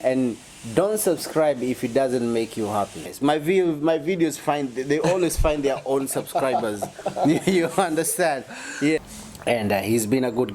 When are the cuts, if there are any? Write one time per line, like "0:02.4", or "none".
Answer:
0:03.1
0:09.0